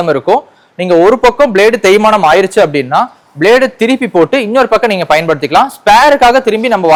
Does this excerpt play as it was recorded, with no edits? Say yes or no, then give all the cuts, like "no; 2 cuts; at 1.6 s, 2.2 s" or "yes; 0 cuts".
yes; 0 cuts